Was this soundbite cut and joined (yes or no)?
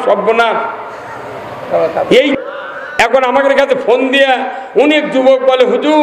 yes